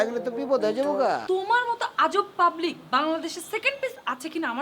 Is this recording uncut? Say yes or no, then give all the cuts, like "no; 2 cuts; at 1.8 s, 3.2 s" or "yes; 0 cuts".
no; 1 cut; at 1.2 s